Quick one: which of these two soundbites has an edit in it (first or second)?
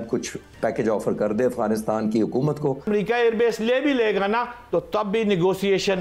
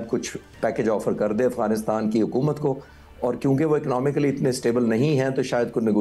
first